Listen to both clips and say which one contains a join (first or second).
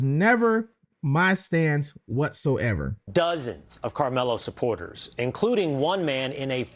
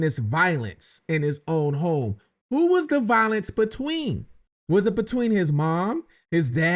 first